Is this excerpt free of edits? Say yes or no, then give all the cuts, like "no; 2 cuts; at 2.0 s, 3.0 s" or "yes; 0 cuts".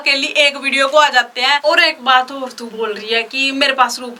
no; 2 cuts; at 1.6 s, 2.6 s